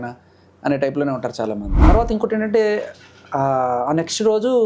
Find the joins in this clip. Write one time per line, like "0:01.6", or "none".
0:01.9

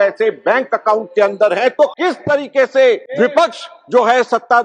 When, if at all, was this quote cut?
0:02.0
0:03.1

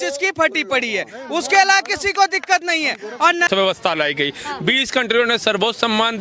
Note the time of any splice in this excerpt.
0:03.5

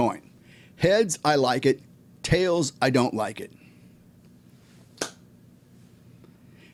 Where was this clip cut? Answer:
none

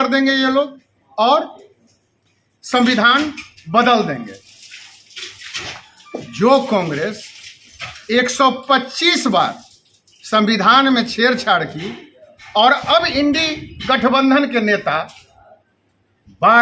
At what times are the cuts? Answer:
none

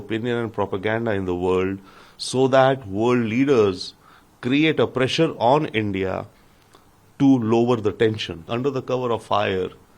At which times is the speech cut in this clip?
0:08.5

